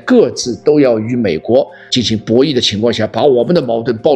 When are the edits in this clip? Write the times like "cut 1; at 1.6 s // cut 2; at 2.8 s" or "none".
cut 1; at 1.8 s